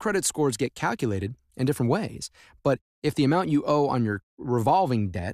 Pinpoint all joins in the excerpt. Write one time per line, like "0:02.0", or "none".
none